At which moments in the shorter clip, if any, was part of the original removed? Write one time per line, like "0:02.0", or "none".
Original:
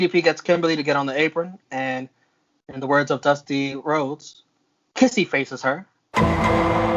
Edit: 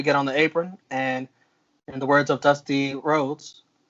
none